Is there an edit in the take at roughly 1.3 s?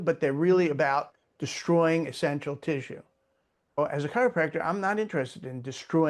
no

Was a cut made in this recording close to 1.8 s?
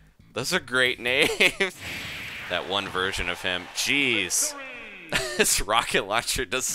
yes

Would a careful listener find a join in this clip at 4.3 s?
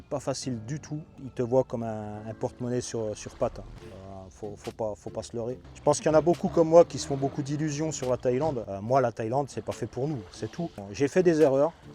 no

